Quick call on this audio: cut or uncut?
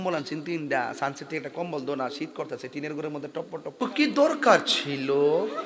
cut